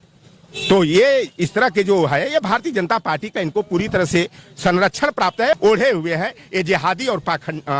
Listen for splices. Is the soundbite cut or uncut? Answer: cut